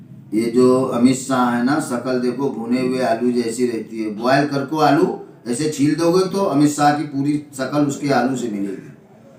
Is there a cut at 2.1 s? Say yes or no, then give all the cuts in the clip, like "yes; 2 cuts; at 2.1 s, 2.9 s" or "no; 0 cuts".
no; 0 cuts